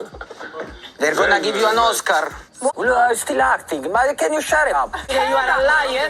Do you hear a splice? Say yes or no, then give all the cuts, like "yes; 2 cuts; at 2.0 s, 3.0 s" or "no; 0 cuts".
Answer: yes; 2 cuts; at 2.7 s, 5.3 s